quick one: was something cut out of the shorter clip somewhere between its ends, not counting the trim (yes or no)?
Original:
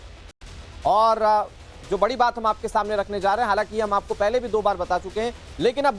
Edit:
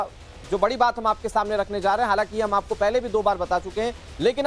no